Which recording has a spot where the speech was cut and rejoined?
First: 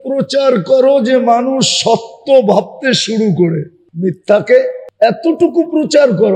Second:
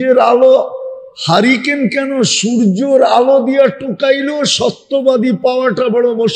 first; 2 cuts; at 3.8 s, 4.8 s

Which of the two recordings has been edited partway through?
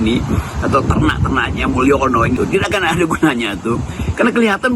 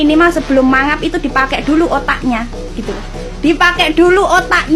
first; 1 cut; at 2.4 s

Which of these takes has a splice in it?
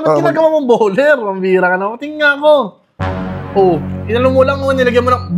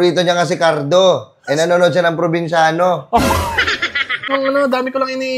second; 1 cut; at 4.3 s

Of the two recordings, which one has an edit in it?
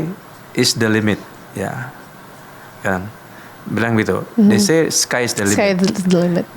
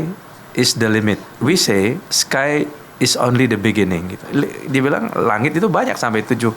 second; 2 cuts; at 1.3 s, 4.2 s

